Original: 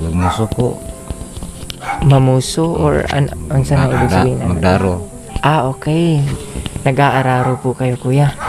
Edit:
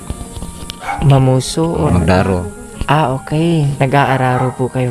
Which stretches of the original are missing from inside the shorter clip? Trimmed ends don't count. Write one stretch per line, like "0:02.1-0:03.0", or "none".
0:02.9-0:04.4
0:06.3-0:06.8